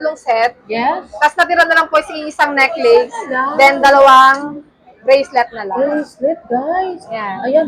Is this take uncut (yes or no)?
yes